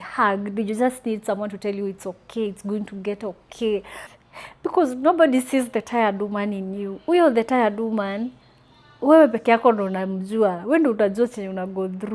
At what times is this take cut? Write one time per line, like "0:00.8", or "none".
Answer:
0:04.0

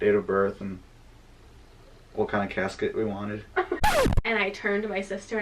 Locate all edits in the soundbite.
0:03.8

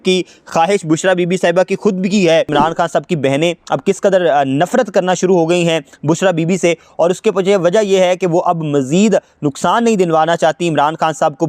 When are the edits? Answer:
0:02.5

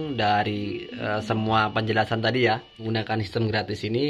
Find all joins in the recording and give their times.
0:02.9

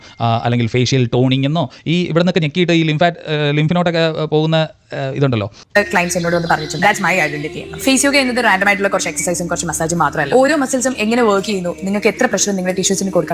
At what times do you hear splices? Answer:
0:05.6

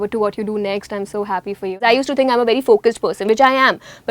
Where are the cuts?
0:01.8

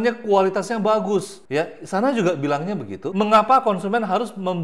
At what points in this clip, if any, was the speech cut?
0:01.4

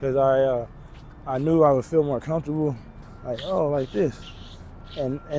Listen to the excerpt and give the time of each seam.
0:02.9

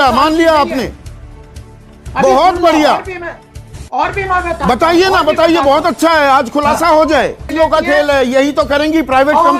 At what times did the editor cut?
0:07.5

